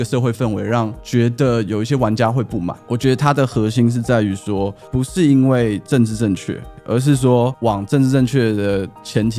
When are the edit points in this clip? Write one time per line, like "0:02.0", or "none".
none